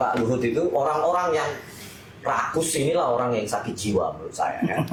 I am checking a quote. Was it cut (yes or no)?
no